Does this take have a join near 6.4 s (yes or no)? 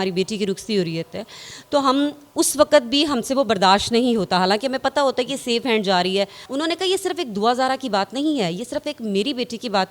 yes